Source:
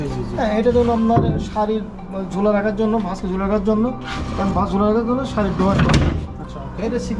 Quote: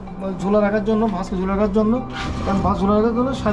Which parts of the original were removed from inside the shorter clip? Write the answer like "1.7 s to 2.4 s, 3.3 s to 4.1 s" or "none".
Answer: none